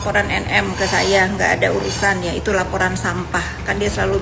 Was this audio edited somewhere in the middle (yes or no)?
no